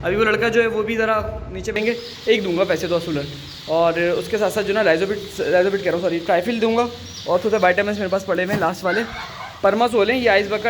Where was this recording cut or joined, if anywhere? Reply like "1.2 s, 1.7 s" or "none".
1.8 s